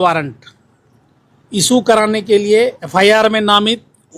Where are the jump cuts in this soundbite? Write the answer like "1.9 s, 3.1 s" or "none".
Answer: 2.8 s